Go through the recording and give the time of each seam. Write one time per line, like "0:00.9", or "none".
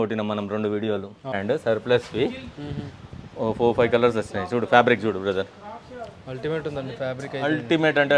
0:01.3